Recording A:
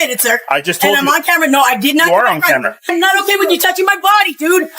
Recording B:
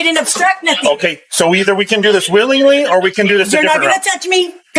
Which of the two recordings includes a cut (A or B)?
A